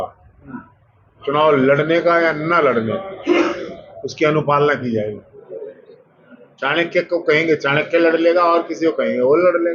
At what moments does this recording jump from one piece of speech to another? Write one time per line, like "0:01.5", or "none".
none